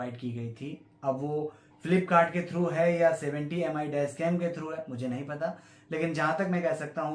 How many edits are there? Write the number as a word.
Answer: zero